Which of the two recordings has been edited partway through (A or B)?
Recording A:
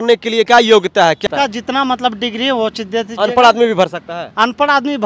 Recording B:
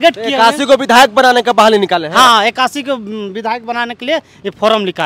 A